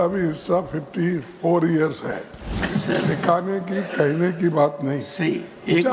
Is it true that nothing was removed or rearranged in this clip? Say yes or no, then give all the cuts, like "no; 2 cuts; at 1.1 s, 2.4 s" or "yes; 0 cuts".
no; 1 cut; at 2.6 s